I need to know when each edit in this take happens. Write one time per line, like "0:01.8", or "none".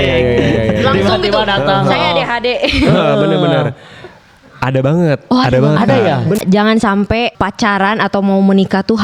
0:06.4
0:07.4